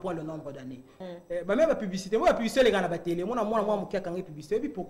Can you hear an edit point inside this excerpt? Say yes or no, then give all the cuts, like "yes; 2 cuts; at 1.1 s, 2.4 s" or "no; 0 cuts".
yes; 1 cut; at 1.0 s